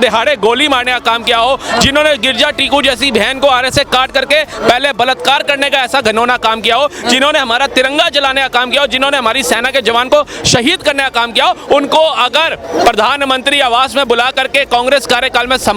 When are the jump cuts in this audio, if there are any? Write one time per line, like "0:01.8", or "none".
none